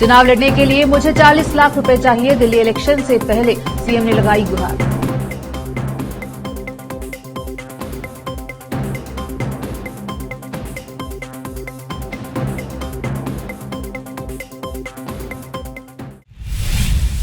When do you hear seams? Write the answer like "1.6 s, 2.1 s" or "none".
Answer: 16.1 s